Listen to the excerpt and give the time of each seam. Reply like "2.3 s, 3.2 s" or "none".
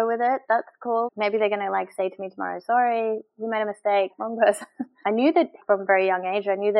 4.8 s, 5.6 s